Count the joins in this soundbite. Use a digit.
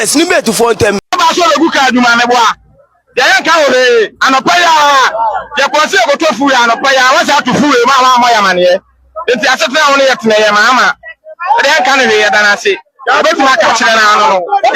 1